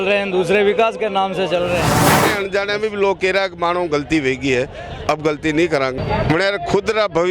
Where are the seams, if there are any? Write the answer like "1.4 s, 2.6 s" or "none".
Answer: 2.0 s, 6.0 s